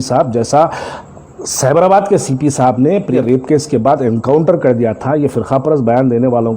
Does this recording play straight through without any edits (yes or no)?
no